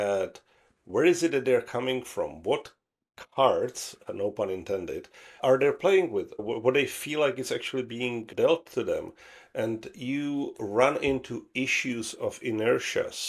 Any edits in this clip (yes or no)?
yes